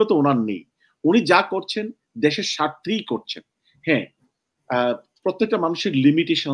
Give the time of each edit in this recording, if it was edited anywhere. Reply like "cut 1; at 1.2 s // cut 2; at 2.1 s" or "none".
none